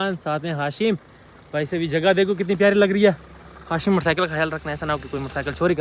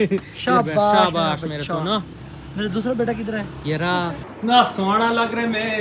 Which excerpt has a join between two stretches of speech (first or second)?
second